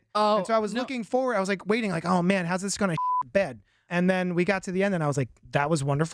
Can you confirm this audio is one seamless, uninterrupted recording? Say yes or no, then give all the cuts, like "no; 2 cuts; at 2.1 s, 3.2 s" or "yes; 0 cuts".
no; 1 cut; at 3.9 s